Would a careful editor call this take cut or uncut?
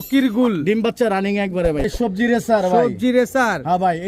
cut